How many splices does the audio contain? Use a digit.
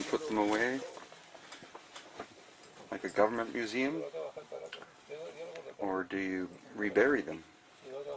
1